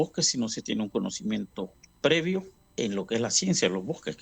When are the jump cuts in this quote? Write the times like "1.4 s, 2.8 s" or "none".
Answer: 1.8 s, 2.6 s